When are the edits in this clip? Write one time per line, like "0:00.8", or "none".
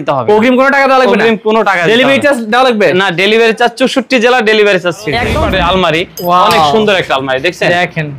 0:05.3